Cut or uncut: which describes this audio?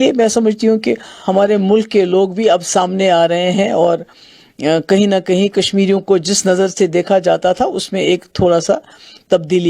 cut